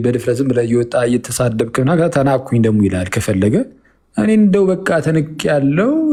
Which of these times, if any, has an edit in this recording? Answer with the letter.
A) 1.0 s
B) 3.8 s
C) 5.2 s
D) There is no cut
D